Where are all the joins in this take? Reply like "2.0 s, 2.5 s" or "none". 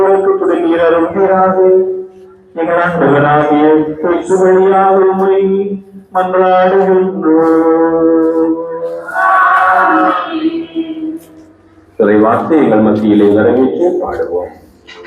none